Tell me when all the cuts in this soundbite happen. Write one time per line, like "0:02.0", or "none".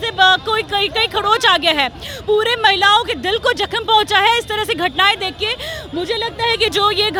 none